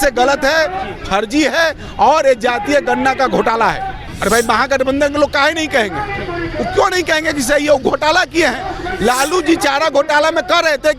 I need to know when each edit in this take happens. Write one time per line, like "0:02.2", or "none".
0:04.0